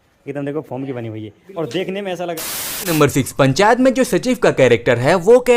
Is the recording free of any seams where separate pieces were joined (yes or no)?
no